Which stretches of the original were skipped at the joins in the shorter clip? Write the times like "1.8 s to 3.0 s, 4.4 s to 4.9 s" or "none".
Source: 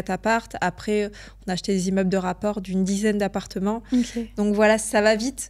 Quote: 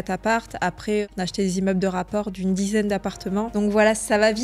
1.1 s to 1.4 s, 3.8 s to 4.3 s

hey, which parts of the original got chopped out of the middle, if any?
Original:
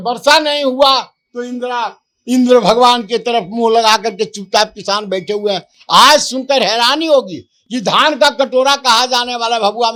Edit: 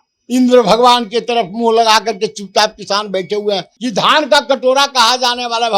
5.7 s to 7.6 s

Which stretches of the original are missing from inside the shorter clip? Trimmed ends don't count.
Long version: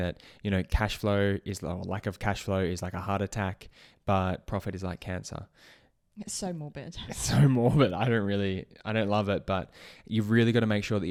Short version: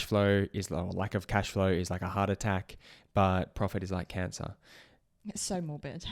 none

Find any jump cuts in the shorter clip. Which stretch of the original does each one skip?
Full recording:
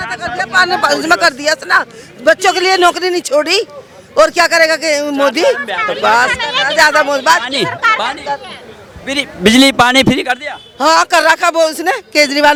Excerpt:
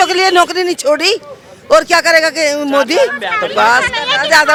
none

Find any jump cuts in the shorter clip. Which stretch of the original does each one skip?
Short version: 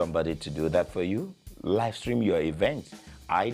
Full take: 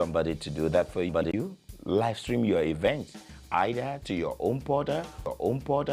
1.1 s to 1.3 s

